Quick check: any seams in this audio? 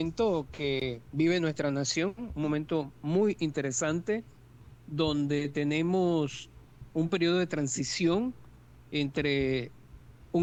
no; 0 cuts

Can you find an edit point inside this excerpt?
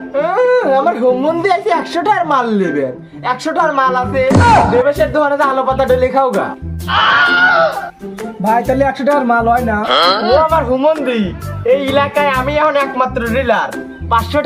no; 0 cuts

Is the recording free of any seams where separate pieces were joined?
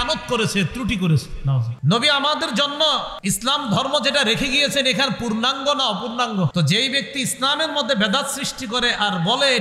no; 3 cuts; at 1.7 s, 3.1 s, 6.5 s

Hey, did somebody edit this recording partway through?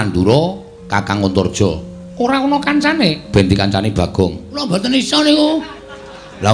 yes; 1 cut; at 4.6 s

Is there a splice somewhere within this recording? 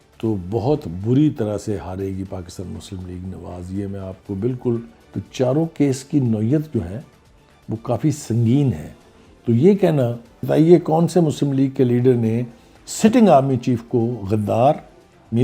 yes; 2 cuts; at 5.0 s, 10.4 s

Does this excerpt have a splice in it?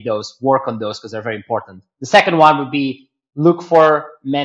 no; 0 cuts

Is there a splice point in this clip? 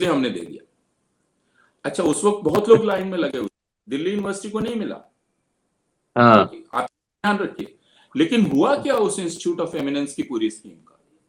no; 0 cuts

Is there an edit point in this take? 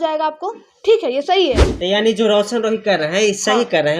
yes; 1 cut; at 1.7 s

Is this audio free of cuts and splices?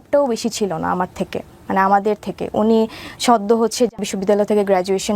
no; 1 cut; at 4.1 s

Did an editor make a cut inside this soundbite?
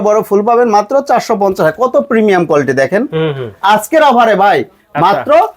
yes; 1 cut; at 3.5 s

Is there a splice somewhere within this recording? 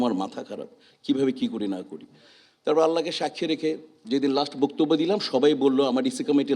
no; 0 cuts

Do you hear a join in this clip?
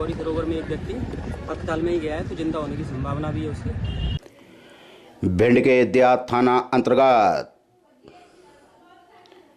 yes; 1 cut; at 4.2 s

